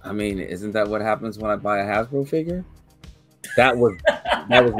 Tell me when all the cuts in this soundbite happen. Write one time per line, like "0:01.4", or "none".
none